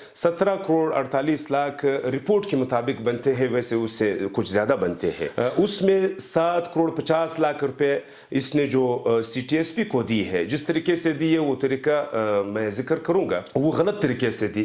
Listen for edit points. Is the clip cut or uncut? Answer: uncut